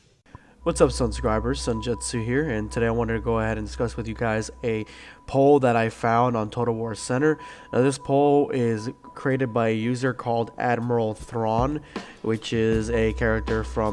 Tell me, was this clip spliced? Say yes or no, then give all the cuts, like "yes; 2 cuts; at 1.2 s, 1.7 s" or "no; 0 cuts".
yes; 1 cut; at 8.8 s